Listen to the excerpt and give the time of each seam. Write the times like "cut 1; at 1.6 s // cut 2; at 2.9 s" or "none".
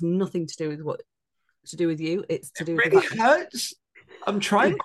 none